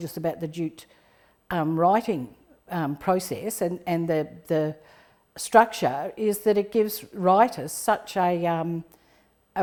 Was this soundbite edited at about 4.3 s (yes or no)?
no